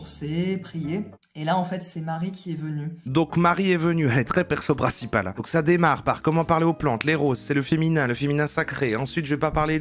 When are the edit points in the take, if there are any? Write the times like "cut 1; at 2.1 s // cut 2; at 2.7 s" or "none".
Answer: cut 1; at 1.2 s // cut 2; at 3.0 s // cut 3; at 5.4 s